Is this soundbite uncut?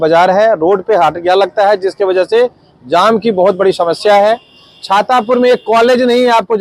yes; 0 cuts

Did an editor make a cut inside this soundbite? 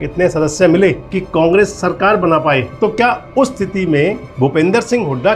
yes; 3 cuts; at 1.1 s, 2.7 s, 4.3 s

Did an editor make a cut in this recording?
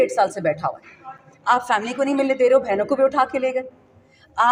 no; 0 cuts

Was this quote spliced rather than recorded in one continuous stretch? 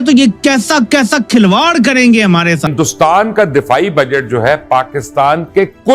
yes; 1 cut; at 2.7 s

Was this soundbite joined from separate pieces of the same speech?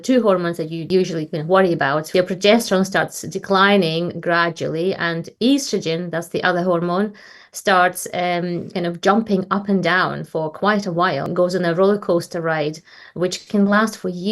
yes; 3 cuts; at 0.8 s, 2.1 s, 11.3 s

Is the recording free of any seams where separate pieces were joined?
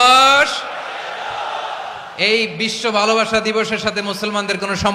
yes; 0 cuts

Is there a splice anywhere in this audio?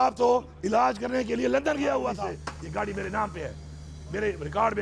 yes; 1 cut; at 2.2 s

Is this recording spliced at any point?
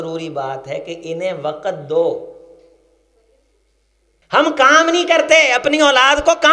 yes; 1 cut; at 4.2 s

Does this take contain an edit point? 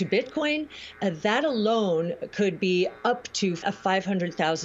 yes; 1 cut; at 3.6 s

